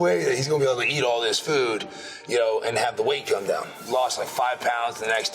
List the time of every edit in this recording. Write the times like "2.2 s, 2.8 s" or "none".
3.7 s

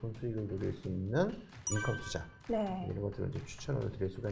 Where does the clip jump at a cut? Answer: none

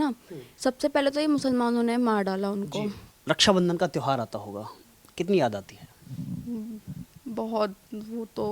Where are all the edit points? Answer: 3.1 s

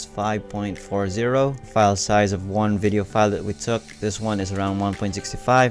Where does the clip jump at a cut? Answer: 1.6 s

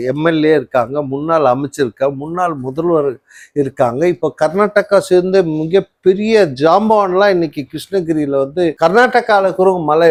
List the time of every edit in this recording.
none

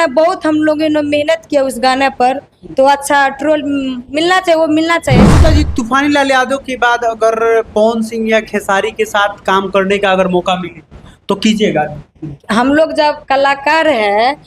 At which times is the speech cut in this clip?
5.3 s

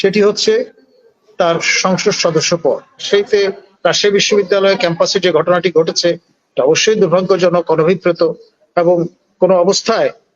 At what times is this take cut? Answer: 3.0 s

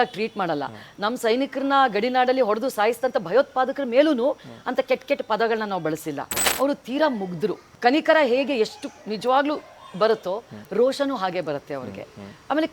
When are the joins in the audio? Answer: 6.4 s, 7.7 s

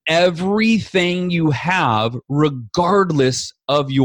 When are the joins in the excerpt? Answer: none

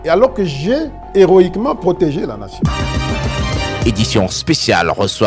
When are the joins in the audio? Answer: 1.0 s, 2.3 s

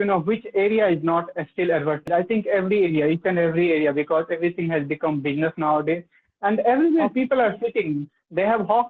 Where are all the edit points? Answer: 2.1 s

